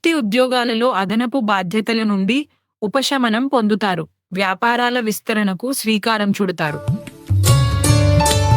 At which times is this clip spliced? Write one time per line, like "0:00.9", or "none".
0:06.8